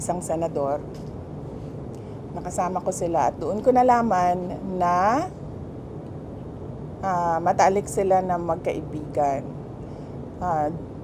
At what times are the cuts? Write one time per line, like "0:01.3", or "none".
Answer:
none